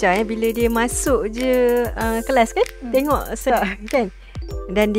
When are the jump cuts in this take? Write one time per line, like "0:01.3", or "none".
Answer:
0:03.5